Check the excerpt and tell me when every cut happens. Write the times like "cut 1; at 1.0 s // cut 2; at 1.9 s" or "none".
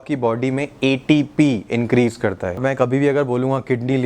cut 1; at 2.6 s